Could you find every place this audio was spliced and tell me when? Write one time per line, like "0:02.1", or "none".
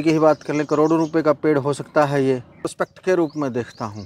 0:02.5